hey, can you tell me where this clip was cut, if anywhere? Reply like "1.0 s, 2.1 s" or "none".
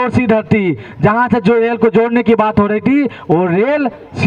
none

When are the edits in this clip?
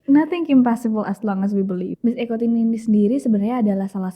1.9 s

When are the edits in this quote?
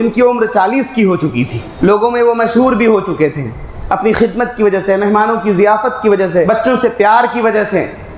1.6 s, 6.5 s

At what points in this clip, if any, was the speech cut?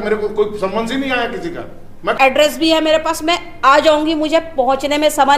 2.1 s

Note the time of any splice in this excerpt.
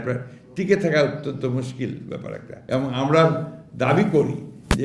2.5 s

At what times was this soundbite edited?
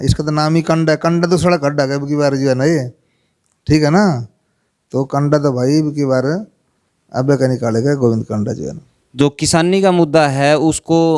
none

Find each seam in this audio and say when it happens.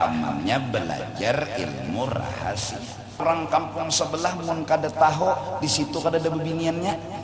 3.2 s

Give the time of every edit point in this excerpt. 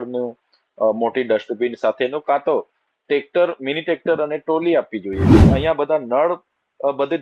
5.4 s

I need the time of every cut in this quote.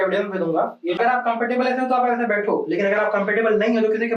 1.0 s

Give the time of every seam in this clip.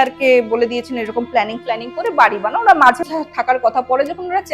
3.0 s

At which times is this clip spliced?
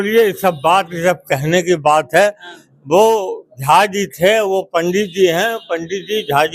none

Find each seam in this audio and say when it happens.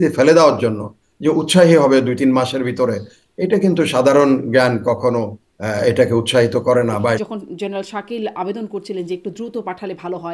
7.2 s

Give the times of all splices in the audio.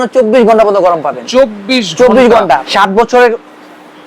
2.4 s

